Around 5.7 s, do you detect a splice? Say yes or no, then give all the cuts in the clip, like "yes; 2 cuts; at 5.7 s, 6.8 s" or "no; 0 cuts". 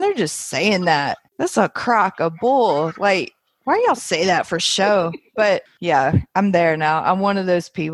yes; 2 cuts; at 1.2 s, 5.7 s